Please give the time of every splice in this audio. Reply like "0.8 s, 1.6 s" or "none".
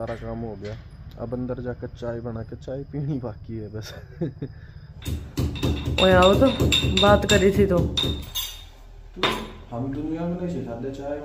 4.9 s

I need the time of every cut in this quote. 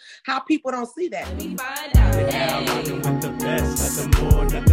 1.3 s

